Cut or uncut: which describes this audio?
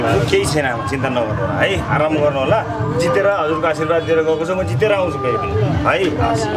uncut